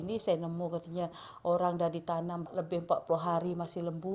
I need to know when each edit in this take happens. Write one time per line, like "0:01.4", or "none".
0:02.5